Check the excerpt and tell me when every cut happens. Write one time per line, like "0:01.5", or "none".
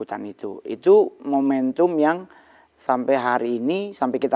none